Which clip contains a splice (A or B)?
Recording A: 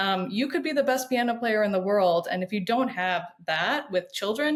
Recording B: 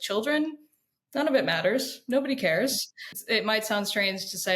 B